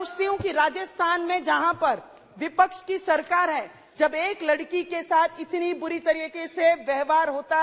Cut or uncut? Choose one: uncut